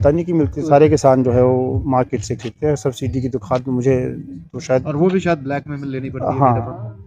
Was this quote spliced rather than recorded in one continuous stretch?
no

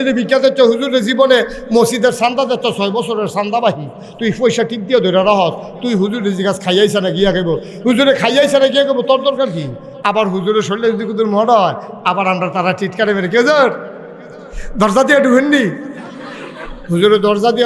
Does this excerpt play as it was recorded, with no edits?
yes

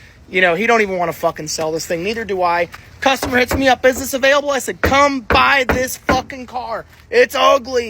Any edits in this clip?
no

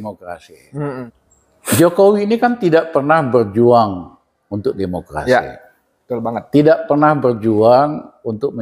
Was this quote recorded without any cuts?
no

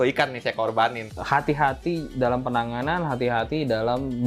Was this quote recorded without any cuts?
no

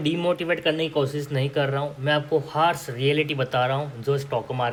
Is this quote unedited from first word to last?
yes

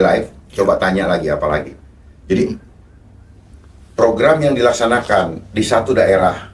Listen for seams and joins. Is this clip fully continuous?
yes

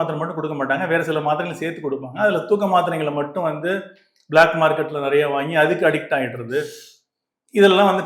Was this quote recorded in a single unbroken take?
yes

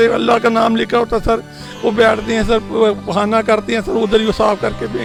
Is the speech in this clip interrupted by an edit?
no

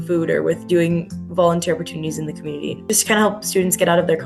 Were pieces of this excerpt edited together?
yes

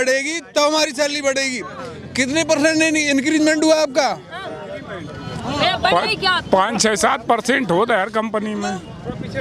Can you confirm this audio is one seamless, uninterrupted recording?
yes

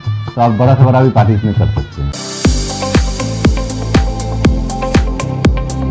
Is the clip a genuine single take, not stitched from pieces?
no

